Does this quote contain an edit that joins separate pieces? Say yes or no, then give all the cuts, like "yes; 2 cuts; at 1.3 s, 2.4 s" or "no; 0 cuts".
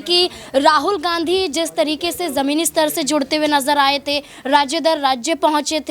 no; 0 cuts